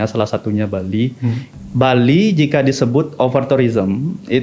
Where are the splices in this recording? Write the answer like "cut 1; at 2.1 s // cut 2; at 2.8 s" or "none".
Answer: cut 1; at 1.4 s